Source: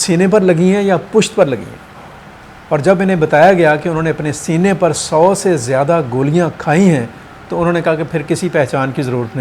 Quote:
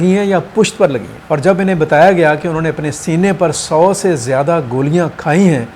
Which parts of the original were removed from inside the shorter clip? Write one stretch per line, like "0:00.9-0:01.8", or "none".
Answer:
0:01.7-0:02.5